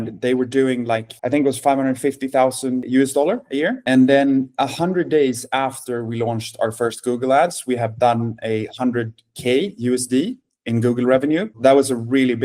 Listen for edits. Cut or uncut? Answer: cut